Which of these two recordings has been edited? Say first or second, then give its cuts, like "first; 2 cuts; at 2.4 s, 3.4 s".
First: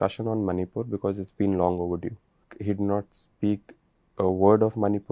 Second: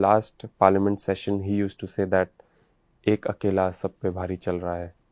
first; 1 cut; at 2.5 s